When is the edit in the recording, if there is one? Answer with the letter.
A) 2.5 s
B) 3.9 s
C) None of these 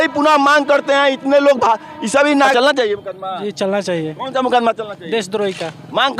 A